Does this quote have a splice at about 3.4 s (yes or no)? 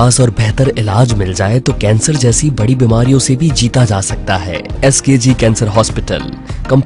no